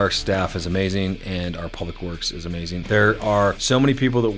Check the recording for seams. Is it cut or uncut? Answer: cut